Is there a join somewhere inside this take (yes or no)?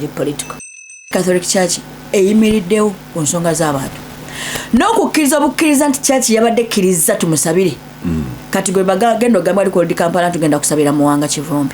yes